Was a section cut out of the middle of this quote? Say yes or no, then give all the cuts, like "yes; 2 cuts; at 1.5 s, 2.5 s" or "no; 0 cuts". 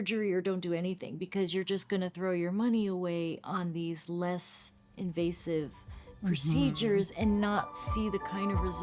no; 0 cuts